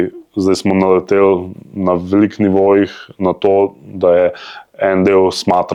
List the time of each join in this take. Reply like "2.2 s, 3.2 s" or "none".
none